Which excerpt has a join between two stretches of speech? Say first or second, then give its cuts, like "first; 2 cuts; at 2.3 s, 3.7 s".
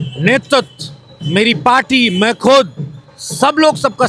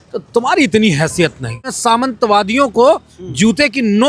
second; 1 cut; at 1.8 s